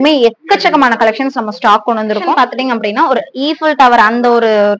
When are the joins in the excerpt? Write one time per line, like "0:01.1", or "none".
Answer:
0:02.3